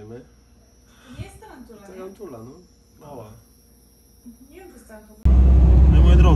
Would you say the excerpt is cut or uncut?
cut